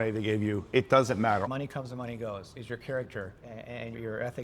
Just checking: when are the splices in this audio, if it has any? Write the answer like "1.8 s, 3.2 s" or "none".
1.5 s, 3.5 s